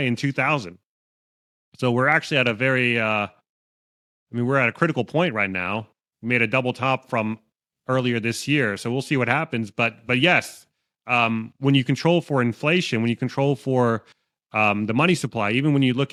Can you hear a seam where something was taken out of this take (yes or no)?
no